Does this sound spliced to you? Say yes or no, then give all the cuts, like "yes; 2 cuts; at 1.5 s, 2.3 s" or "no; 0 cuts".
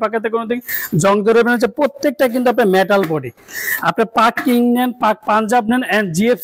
no; 0 cuts